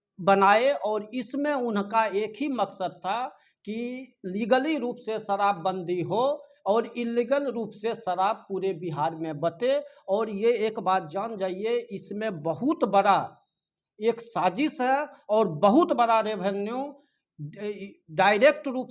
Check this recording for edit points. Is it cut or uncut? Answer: uncut